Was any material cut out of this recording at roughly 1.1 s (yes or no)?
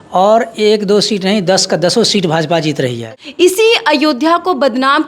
no